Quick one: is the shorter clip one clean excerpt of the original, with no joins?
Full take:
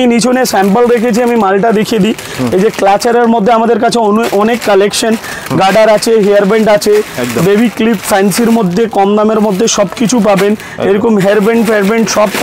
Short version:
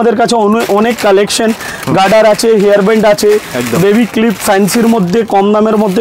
yes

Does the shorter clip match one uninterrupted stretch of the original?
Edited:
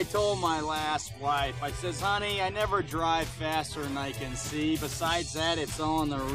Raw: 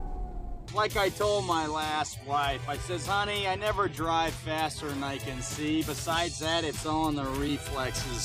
yes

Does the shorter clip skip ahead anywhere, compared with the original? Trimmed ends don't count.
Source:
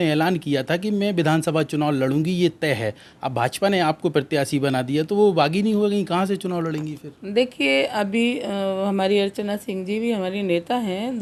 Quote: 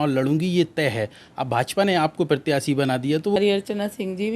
yes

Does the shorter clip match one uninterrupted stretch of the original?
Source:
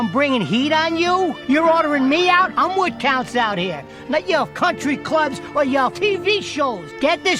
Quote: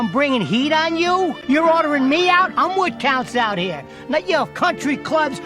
yes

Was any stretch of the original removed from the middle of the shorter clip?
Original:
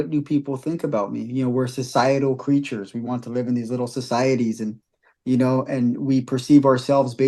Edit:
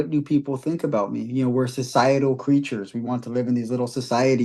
no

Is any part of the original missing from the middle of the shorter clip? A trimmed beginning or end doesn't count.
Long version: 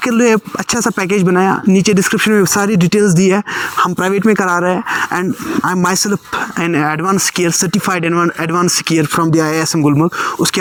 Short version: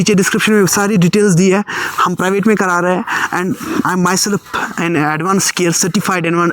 no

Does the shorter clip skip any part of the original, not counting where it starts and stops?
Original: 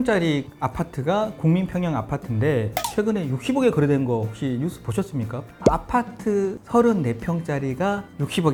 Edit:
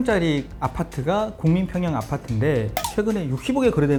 no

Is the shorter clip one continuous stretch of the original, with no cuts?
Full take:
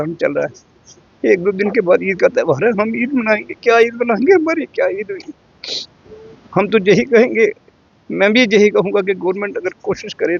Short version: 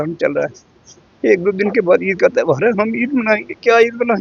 yes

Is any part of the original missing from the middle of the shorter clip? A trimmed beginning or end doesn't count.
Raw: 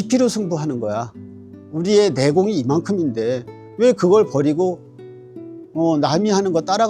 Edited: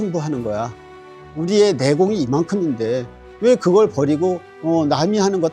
yes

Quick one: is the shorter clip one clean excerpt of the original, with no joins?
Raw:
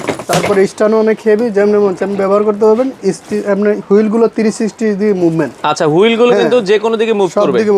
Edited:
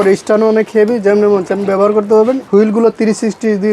no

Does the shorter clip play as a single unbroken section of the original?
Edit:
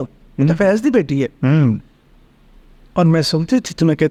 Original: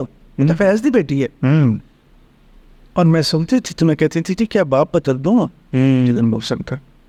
yes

